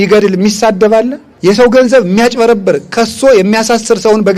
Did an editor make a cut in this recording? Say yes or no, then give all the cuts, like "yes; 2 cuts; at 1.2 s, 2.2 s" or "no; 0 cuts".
yes; 1 cut; at 1.2 s